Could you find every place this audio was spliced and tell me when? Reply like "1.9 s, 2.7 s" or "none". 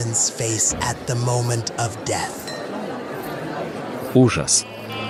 none